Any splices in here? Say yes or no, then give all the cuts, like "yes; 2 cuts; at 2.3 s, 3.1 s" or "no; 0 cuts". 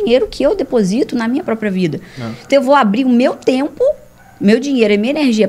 no; 0 cuts